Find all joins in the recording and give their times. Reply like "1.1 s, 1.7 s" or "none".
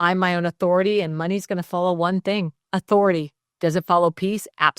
2.6 s, 3.5 s